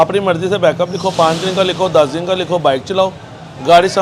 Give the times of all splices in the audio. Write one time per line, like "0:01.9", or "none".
none